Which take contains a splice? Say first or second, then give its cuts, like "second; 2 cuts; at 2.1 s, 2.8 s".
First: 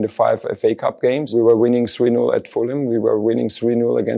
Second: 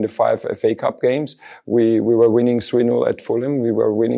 first; 1 cut; at 1.3 s